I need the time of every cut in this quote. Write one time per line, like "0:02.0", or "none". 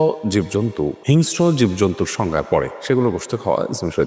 0:01.0